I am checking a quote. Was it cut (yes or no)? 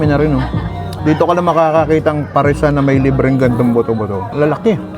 yes